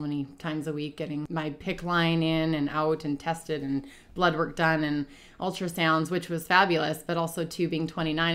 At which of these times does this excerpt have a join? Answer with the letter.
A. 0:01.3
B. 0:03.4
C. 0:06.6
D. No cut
A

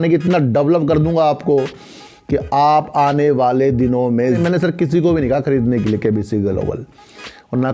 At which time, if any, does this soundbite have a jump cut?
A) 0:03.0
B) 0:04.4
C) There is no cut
B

